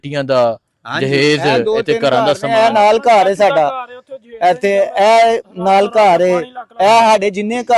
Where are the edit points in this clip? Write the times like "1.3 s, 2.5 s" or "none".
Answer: none